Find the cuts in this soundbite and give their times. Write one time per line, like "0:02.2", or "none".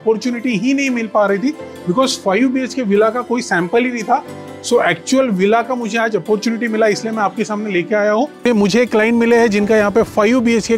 0:08.4